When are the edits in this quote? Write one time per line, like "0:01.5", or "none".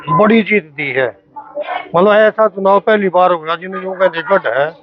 none